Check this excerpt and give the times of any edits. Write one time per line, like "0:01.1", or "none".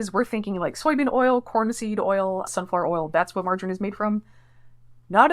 none